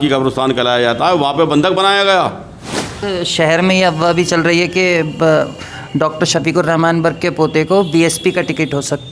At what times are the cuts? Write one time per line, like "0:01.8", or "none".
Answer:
0:03.0